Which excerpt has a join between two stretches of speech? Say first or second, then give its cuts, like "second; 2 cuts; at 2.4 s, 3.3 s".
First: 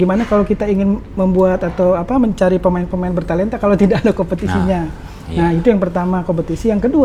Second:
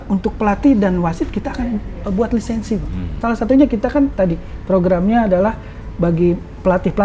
second; 1 cut; at 3.1 s